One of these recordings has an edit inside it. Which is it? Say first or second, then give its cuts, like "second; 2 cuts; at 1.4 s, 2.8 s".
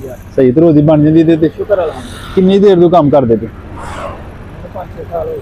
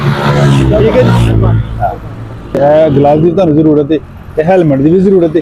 second; 1 cut; at 2.6 s